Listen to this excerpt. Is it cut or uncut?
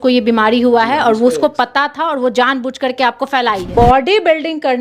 cut